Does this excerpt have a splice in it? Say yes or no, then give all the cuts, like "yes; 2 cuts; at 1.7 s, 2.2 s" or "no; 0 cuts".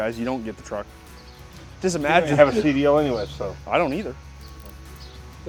no; 0 cuts